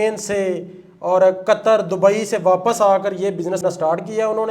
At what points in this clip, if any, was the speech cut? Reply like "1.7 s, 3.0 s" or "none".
3.6 s

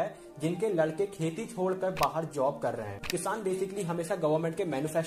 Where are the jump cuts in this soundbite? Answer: 3.0 s

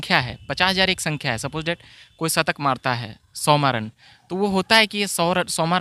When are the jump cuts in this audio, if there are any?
none

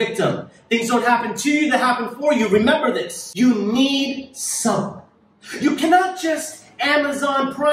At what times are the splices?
3.2 s

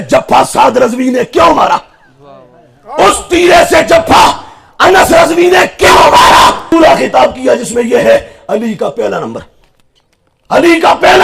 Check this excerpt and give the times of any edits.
6.7 s

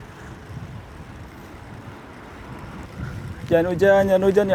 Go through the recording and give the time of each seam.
2.8 s

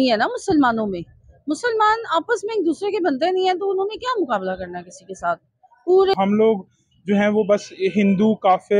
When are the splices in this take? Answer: 6.1 s

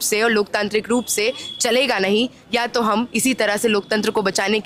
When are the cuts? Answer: none

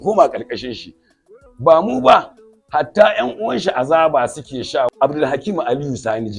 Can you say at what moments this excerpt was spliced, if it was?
4.9 s

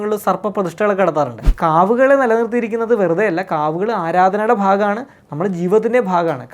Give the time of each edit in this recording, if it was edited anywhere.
1.5 s

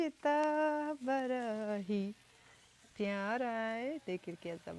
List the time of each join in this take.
none

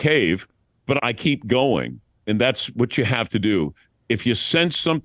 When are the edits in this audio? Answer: 1.0 s

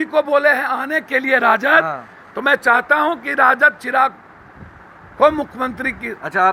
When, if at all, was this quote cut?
none

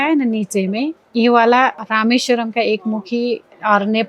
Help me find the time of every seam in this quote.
1.9 s

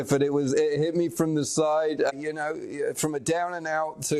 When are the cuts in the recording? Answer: 2.1 s

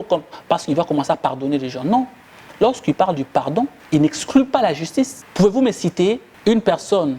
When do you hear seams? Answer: 3.8 s, 5.2 s, 6.3 s

